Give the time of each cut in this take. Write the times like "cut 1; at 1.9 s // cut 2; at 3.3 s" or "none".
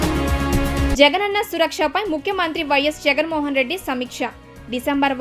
cut 1; at 0.9 s

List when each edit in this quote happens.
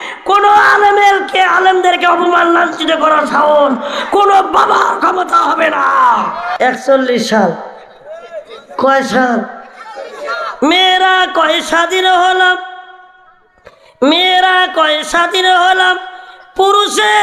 cut 1; at 6.5 s

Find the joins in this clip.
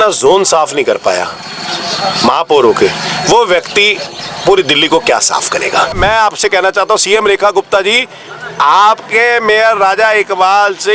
cut 1; at 6.0 s

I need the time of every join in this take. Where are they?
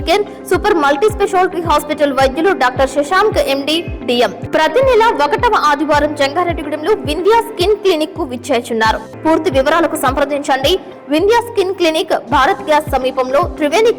cut 1; at 4.4 s // cut 2; at 9.1 s

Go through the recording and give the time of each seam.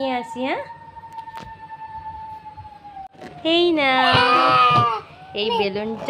cut 1; at 3.1 s

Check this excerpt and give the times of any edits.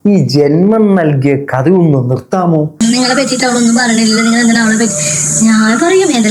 cut 1; at 2.8 s

